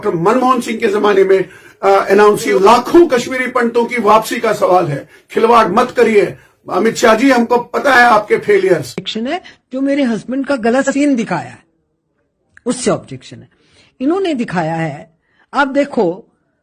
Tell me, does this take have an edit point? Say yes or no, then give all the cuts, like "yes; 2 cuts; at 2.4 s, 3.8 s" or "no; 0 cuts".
yes; 2 cuts; at 2.5 s, 9.1 s